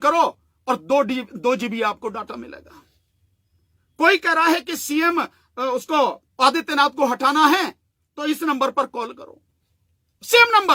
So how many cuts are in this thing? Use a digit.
0